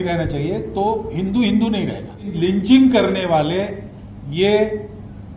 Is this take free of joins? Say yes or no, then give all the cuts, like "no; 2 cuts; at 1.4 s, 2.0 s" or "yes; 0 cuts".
no; 1 cut; at 2.2 s